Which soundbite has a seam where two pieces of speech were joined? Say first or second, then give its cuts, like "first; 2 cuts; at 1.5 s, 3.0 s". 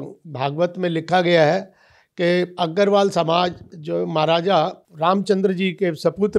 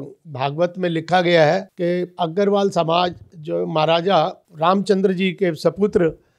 second; 1 cut; at 1.7 s